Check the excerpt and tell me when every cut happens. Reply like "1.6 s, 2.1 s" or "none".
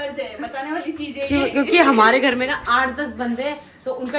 none